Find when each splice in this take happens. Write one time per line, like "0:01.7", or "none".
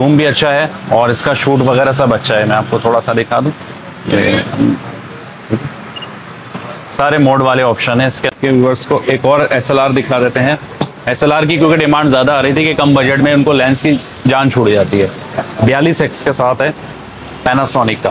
0:08.3